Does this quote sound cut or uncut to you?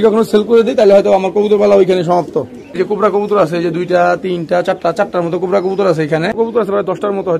cut